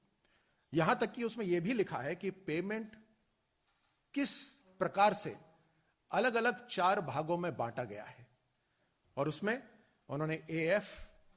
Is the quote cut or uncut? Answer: uncut